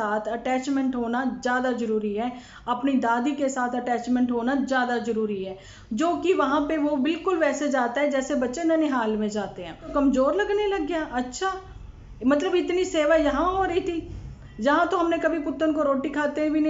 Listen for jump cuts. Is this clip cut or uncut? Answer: cut